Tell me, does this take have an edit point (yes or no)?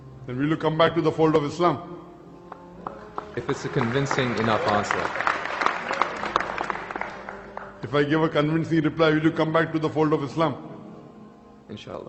no